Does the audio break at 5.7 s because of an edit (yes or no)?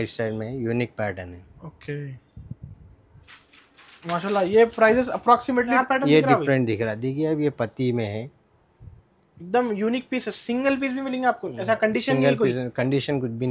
yes